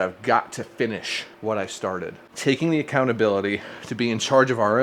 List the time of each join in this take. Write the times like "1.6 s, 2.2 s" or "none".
2.2 s

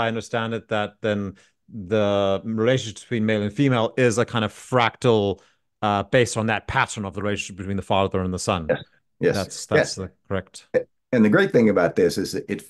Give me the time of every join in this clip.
none

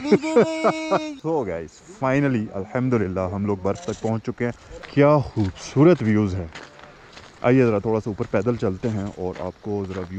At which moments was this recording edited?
1.1 s, 4.7 s

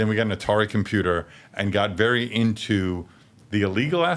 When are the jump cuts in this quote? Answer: none

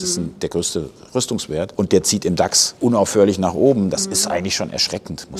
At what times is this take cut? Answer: 1.7 s, 2.6 s

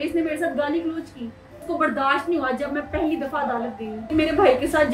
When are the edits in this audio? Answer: 1.5 s, 4.1 s

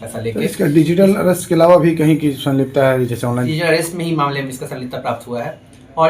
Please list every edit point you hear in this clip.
3.5 s

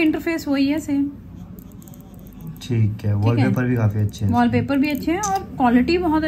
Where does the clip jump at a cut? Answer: none

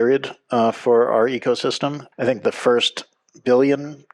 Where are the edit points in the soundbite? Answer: 2.0 s

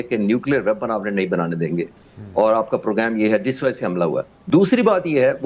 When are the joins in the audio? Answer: 4.3 s

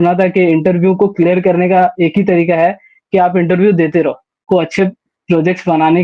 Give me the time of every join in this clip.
4.4 s

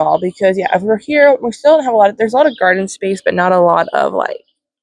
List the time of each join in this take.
none

